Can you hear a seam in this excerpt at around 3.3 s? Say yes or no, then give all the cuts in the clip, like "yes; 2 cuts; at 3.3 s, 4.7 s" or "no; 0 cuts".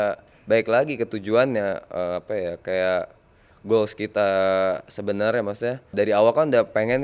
no; 1 cut; at 5.9 s